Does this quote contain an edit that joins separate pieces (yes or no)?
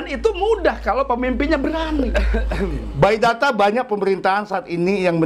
yes